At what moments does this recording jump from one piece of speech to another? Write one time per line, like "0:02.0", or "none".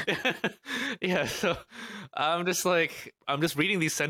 0:03.2